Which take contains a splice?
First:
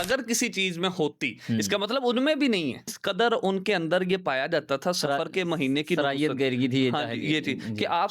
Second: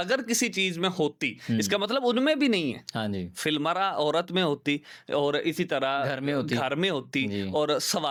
first; 1 cut; at 3.0 s

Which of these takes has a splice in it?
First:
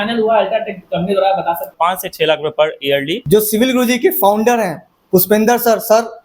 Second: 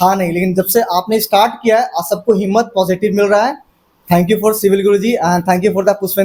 first; 2 cuts; at 1.7 s, 3.1 s

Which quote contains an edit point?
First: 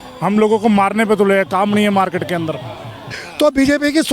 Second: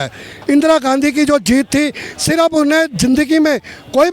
first; 1 cut; at 3.2 s

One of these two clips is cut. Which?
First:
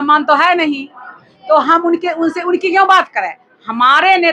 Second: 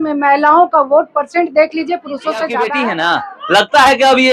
second; 1 cut; at 2.7 s

